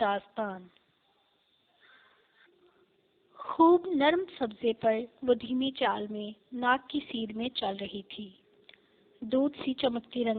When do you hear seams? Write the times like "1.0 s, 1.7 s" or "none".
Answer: 2.7 s